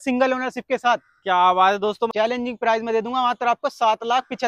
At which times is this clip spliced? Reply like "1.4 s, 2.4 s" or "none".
2.1 s